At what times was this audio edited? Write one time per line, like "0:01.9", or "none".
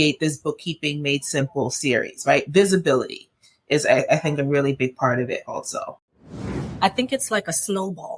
0:06.6